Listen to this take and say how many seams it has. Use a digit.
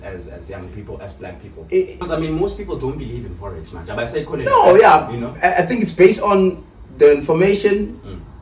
1